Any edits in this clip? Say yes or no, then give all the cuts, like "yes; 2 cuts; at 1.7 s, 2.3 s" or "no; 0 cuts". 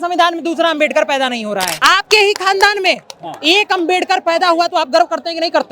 yes; 1 cut; at 1.8 s